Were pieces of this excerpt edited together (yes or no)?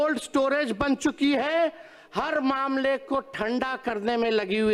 no